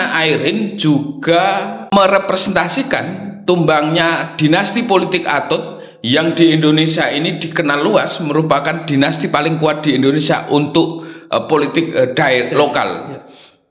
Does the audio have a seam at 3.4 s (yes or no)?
no